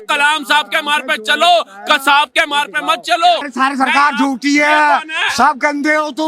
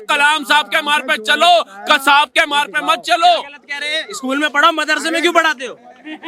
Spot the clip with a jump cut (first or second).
first